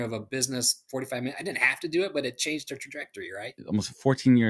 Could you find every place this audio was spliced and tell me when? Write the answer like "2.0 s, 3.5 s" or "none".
3.5 s